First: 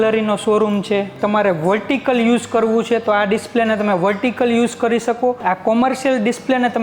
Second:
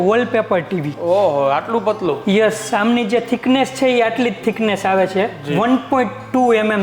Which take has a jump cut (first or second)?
first